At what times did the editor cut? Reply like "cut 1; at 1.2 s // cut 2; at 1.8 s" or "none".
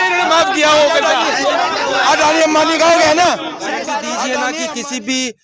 cut 1; at 4.5 s